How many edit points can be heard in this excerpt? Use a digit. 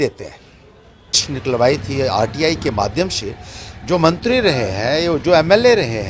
1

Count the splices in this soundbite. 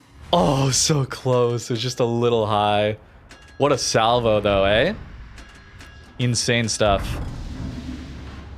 0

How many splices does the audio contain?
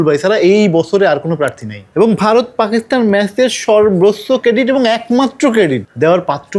1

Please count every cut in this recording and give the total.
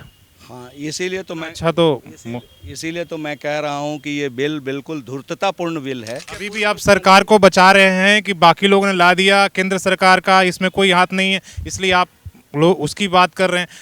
1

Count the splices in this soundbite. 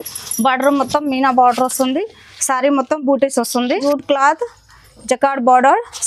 1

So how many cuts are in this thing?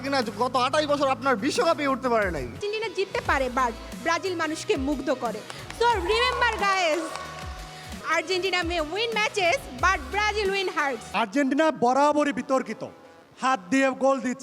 3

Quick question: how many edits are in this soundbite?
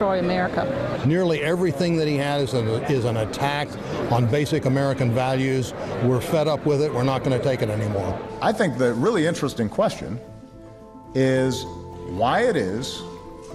1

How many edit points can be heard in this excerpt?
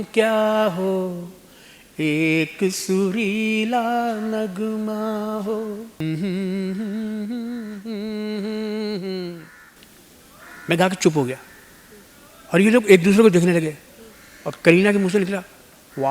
1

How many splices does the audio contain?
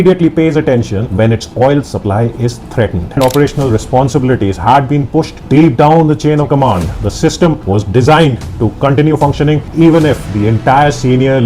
2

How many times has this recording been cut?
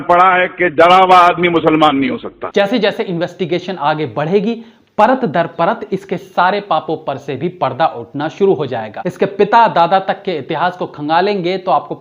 2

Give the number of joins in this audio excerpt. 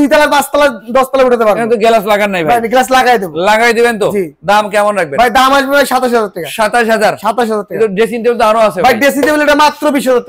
0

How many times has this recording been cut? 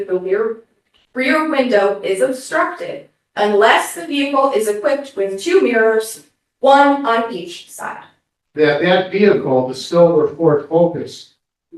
1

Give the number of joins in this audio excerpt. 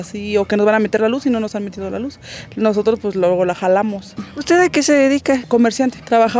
0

